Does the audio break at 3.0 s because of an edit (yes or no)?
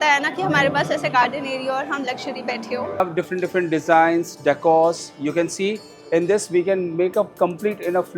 yes